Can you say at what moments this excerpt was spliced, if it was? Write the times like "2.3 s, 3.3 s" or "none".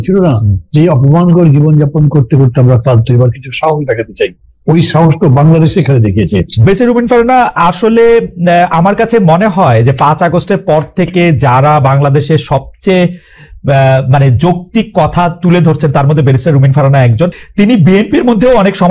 6.5 s, 17.3 s